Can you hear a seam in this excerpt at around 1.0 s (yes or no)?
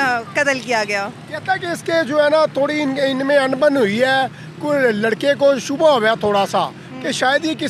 no